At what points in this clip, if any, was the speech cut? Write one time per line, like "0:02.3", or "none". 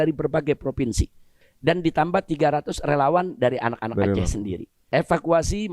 0:01.2
0:04.8